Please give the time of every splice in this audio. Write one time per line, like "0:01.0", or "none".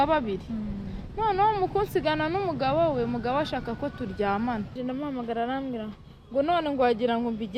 0:04.7